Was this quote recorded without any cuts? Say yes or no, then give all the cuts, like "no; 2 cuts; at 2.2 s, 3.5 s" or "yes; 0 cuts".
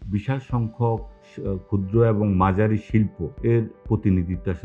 yes; 0 cuts